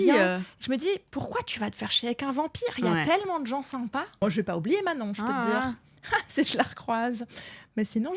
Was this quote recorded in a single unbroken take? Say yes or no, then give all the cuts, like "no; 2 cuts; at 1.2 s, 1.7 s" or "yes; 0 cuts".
no; 1 cut; at 4.2 s